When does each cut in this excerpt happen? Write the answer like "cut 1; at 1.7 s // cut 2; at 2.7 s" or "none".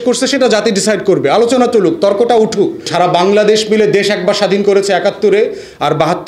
cut 1; at 2.9 s